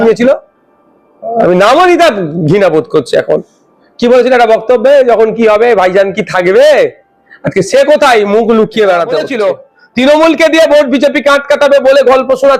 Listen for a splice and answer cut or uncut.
cut